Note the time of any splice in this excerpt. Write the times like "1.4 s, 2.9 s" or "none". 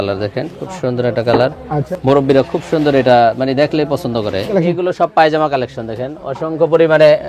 1.8 s, 4.5 s